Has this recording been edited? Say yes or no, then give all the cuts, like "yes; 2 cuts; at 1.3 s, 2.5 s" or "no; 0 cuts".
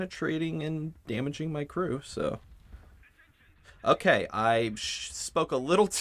no; 0 cuts